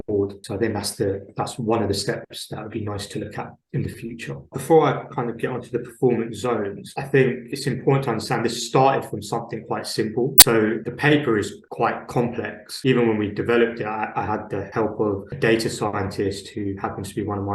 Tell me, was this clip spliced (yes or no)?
yes